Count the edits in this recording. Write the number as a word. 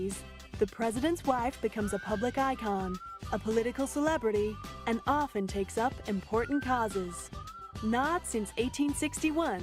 one